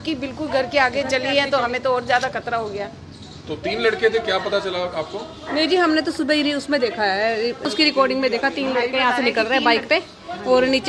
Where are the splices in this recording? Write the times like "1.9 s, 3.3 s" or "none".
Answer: none